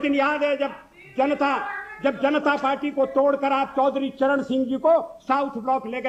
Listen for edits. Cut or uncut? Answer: uncut